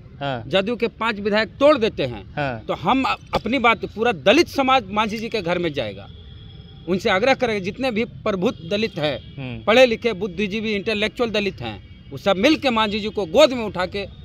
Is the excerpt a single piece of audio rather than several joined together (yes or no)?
yes